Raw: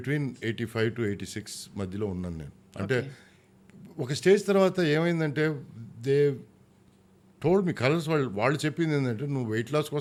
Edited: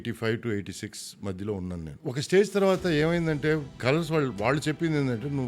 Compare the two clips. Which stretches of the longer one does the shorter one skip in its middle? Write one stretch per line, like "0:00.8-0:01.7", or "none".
0:02.4-0:03.8
0:05.7-0:07.8